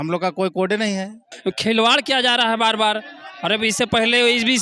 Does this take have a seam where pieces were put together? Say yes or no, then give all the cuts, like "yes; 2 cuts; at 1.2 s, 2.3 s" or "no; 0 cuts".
yes; 1 cut; at 1.3 s